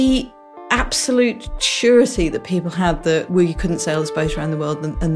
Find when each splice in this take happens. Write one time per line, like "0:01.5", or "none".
none